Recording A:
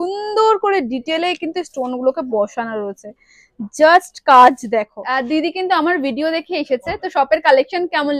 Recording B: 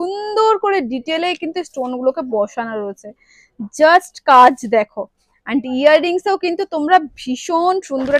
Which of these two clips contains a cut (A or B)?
A